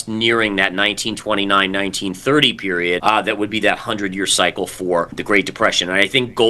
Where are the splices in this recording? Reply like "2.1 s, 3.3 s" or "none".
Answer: 3.0 s, 5.2 s